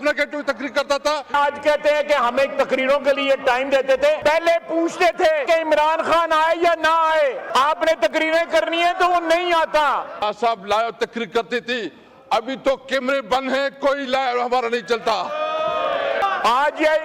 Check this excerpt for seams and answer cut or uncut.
cut